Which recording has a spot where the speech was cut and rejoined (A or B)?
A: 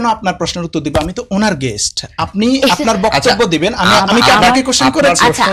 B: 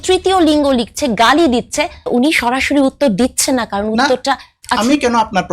B